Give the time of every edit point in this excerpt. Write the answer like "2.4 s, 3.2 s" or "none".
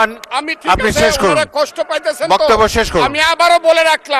none